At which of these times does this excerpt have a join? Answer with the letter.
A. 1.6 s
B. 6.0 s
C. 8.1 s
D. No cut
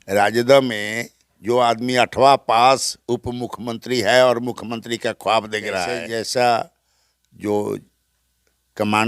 B